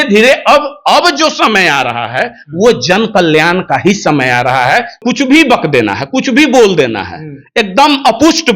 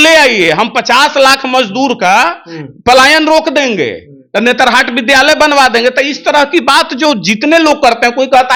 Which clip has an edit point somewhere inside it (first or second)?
first